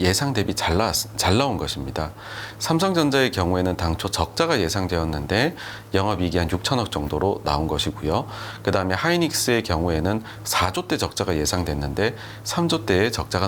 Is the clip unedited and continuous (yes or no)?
yes